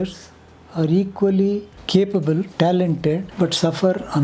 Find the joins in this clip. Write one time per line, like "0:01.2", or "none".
0:01.8
0:02.5
0:03.3